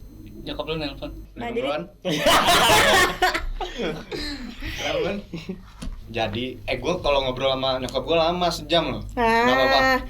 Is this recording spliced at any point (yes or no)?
yes